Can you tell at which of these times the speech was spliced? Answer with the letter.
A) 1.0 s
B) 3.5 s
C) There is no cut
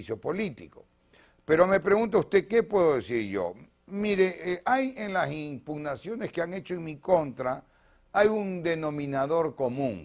B